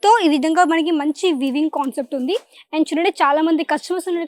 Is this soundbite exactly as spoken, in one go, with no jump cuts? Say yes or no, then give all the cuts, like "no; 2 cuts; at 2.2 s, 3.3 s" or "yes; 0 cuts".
yes; 0 cuts